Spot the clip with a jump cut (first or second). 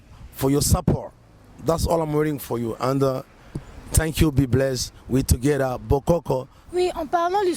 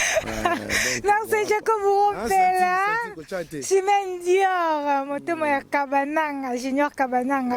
first